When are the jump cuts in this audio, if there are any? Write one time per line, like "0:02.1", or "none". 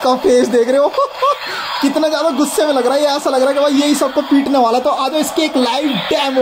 none